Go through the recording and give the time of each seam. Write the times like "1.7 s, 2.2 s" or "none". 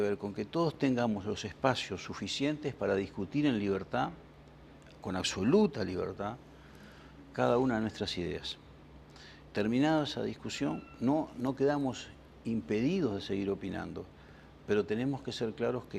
6.4 s